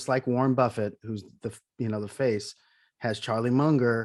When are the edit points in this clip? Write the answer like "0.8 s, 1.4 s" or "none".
none